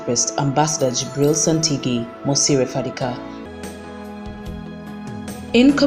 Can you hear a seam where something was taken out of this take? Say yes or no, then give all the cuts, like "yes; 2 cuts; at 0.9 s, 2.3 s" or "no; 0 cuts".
yes; 1 cut; at 3.5 s